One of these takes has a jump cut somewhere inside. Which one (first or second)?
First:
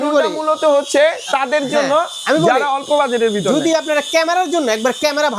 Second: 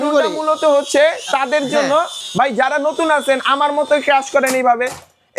second